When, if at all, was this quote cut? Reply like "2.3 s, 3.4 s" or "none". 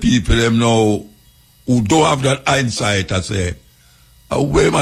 none